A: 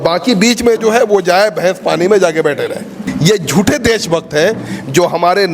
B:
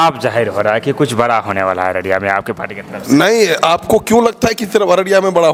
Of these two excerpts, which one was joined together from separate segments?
A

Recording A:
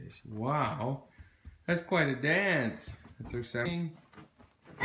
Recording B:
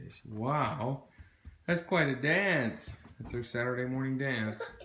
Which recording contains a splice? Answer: B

